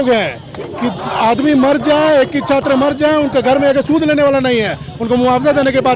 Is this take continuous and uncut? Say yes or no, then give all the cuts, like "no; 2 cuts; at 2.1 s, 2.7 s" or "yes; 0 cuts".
yes; 0 cuts